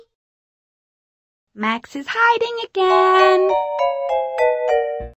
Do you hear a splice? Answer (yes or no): no